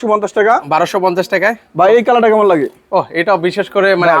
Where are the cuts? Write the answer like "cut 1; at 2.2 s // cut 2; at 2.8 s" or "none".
none